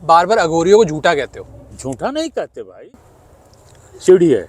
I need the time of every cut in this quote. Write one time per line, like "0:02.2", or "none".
0:02.9